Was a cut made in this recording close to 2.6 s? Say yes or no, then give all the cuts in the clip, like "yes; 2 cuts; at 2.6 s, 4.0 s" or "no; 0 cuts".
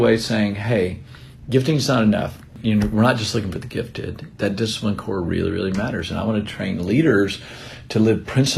yes; 1 cut; at 2.6 s